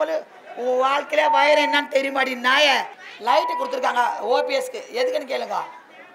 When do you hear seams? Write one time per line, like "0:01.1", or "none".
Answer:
0:03.1